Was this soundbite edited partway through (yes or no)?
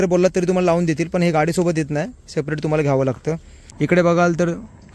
yes